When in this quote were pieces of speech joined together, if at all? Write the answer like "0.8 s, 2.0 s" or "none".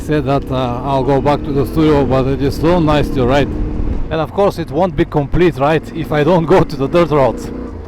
4.1 s